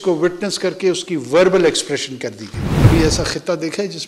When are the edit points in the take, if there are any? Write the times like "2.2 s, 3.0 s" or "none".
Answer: 2.8 s